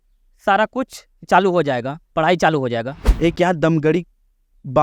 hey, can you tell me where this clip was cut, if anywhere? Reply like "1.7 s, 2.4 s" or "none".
3.0 s